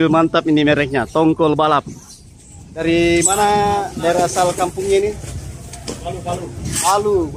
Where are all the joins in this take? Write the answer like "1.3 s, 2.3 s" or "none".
2.8 s